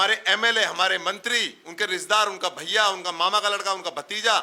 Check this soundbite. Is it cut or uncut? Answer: uncut